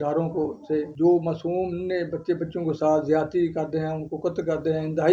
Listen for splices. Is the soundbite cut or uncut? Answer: cut